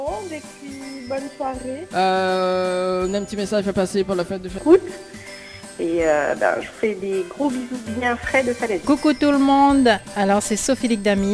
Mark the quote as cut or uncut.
cut